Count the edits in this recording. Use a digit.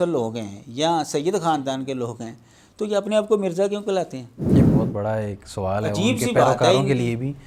0